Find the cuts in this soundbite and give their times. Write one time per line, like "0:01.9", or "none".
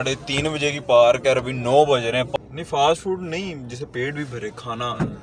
0:02.3